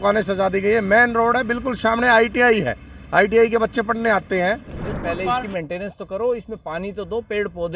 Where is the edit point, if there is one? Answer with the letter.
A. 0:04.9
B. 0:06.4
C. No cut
A